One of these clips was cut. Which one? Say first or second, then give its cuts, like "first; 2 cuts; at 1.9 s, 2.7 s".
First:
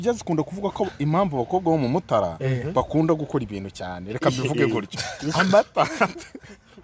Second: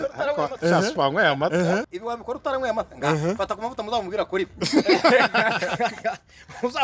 second; 1 cut; at 1.9 s